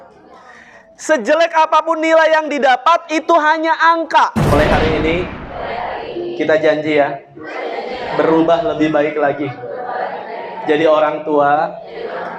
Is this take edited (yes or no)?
yes